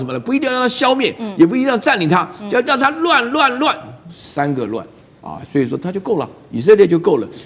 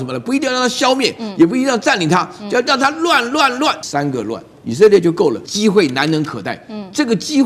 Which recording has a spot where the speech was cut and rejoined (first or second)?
second